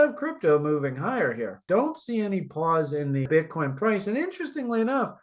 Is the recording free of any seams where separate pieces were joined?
no; 1 cut; at 3.3 s

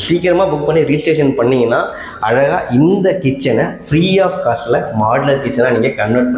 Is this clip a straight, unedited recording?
yes; 0 cuts

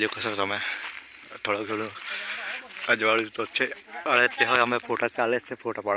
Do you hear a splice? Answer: no; 0 cuts

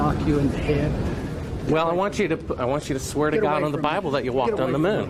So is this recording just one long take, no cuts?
yes; 0 cuts

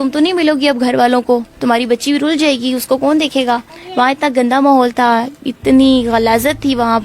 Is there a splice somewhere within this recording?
yes; 1 cut; at 3.8 s

